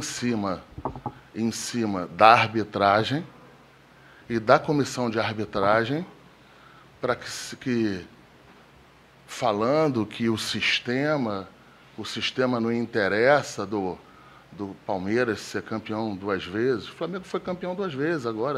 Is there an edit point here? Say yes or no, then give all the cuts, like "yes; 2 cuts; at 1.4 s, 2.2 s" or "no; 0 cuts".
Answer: no; 0 cuts